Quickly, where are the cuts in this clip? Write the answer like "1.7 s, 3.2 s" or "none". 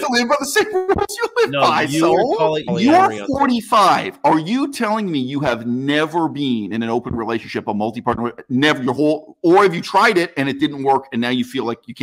2.6 s